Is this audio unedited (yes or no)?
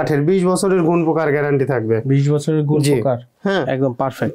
no